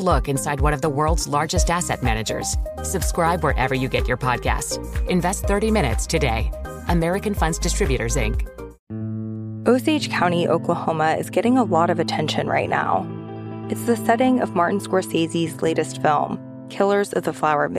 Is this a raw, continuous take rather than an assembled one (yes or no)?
no